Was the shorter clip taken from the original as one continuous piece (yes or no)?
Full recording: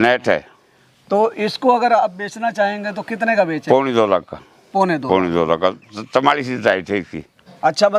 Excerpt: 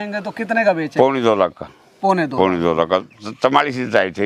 yes